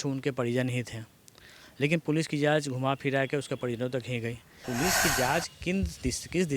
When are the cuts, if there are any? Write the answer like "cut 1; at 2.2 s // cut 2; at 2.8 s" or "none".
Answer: cut 1; at 4.6 s

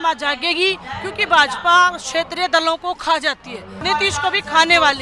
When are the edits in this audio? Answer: cut 1; at 3.8 s

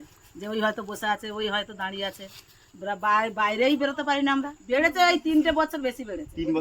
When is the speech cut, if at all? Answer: cut 1; at 4.6 s

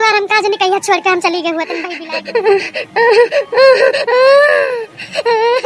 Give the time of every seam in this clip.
cut 1; at 1.9 s

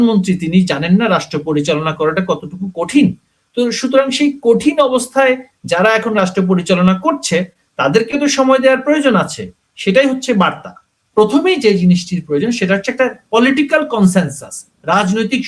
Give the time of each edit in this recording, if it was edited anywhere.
cut 1; at 11.1 s

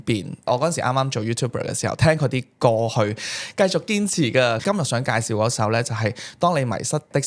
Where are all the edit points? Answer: cut 1; at 4.6 s

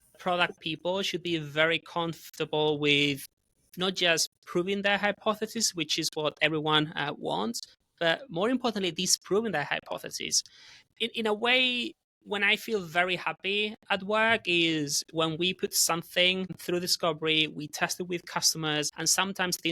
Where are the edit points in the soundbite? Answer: cut 1; at 16.6 s // cut 2; at 18.9 s

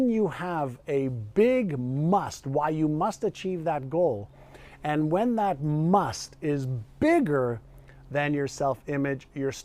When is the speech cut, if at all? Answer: none

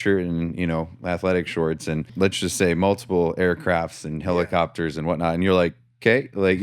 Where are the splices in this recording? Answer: cut 1; at 2.1 s

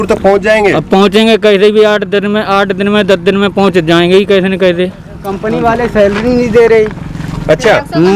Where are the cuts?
cut 1; at 5.3 s

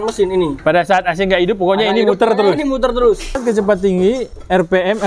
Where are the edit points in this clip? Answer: cut 1; at 3.4 s

